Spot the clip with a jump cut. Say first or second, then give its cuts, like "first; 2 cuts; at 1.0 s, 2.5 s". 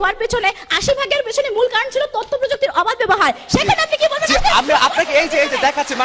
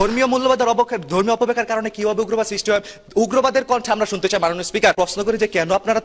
second; 1 cut; at 5.0 s